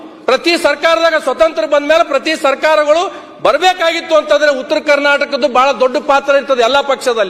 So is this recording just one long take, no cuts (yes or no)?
yes